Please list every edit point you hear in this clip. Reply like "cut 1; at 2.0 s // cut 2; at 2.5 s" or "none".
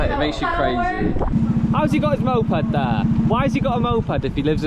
cut 1; at 1.3 s // cut 2; at 3.0 s